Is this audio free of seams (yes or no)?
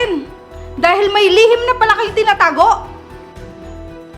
yes